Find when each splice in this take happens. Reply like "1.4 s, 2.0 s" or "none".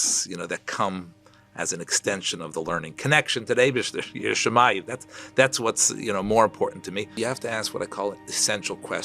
7.2 s